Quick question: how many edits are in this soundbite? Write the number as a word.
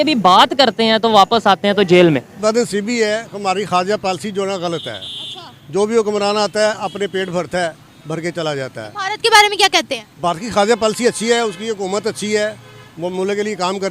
one